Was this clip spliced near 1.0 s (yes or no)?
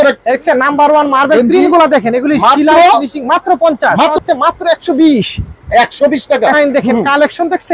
no